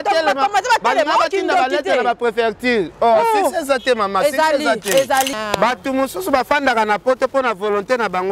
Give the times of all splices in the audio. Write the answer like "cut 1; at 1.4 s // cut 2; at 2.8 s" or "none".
cut 1; at 5.3 s